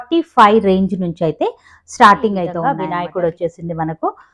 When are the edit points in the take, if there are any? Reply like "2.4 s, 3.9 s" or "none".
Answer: 2.7 s